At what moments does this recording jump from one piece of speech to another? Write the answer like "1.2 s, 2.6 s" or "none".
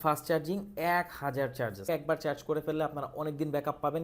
1.9 s